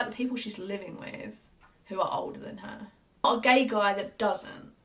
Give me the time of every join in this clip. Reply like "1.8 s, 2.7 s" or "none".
none